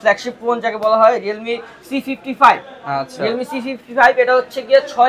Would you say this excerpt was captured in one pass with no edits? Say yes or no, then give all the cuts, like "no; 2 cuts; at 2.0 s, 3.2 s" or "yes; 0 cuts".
yes; 0 cuts